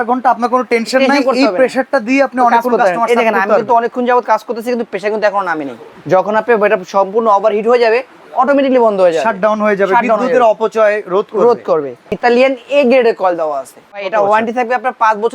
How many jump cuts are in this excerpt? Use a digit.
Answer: 3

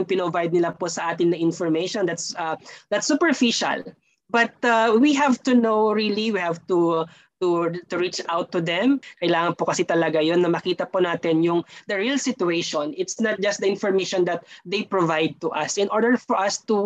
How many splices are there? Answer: 1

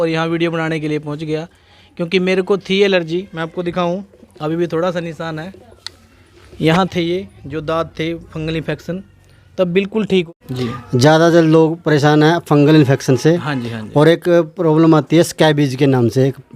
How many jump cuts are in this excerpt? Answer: 1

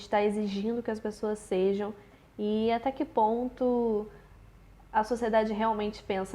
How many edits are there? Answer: 0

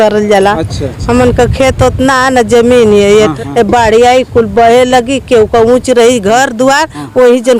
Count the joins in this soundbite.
1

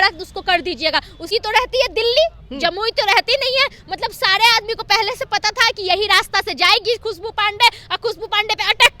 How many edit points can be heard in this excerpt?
1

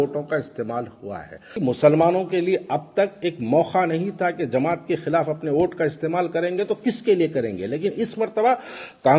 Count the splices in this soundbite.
1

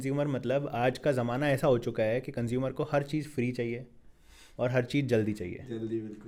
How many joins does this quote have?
0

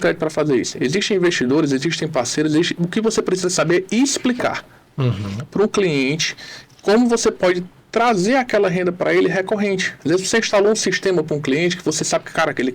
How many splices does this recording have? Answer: 0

